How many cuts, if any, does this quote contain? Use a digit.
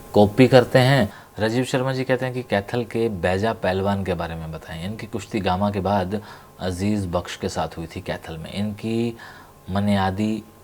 1